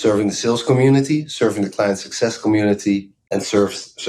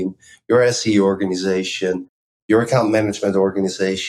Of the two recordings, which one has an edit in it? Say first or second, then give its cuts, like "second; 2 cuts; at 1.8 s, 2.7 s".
first; 1 cut; at 3.2 s